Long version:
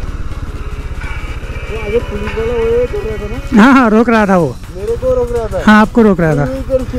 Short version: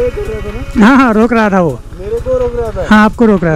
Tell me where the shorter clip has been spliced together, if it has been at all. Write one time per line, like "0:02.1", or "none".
none